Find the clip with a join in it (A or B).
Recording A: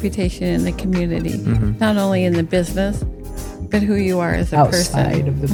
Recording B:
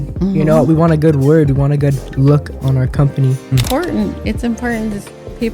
B